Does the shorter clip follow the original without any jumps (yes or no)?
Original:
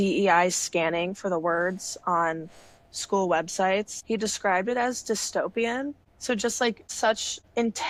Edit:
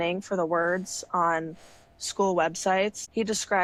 yes